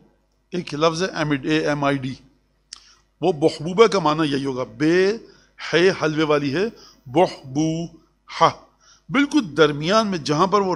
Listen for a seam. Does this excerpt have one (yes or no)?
no